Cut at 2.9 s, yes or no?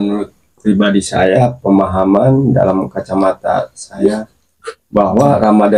no